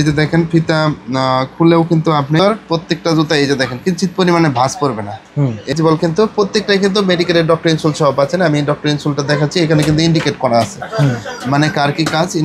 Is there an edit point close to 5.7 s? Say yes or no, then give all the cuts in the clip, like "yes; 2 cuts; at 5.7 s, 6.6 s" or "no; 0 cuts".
yes; 2 cuts; at 2.4 s, 5.7 s